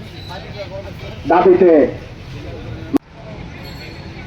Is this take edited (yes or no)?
no